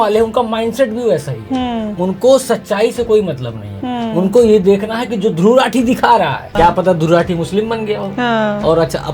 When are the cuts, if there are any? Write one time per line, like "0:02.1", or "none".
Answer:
0:06.5